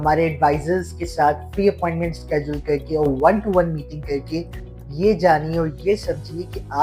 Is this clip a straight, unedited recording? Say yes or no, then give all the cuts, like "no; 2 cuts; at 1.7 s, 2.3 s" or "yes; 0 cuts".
yes; 0 cuts